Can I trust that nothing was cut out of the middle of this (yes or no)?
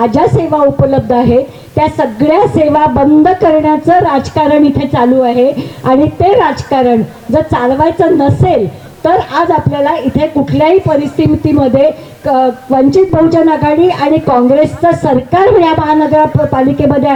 yes